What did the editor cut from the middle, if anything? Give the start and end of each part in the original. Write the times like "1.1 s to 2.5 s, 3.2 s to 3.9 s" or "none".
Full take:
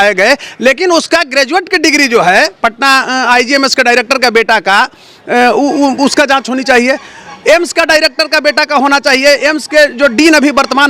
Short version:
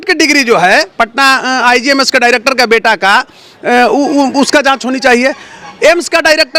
none